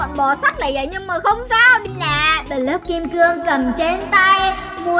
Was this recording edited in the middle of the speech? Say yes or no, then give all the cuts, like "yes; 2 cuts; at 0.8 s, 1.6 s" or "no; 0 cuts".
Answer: yes; 1 cut; at 1.9 s